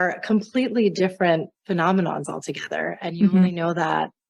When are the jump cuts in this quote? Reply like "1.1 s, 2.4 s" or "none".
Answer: none